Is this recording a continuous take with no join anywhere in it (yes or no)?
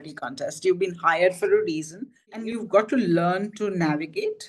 no